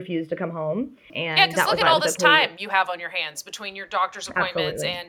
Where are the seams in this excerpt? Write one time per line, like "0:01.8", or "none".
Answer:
0:01.2